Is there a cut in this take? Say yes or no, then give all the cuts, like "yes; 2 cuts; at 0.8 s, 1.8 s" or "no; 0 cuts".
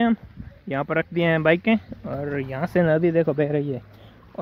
no; 0 cuts